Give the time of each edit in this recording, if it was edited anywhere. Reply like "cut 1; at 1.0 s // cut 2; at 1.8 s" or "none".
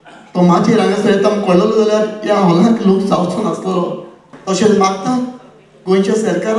cut 1; at 4.3 s